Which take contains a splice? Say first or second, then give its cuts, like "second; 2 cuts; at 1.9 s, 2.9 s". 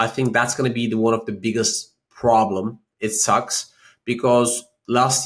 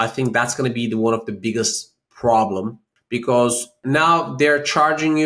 second; 2 cuts; at 2.8 s, 3.8 s